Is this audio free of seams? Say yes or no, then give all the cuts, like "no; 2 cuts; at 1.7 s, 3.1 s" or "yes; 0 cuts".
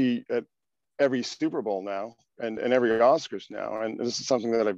yes; 0 cuts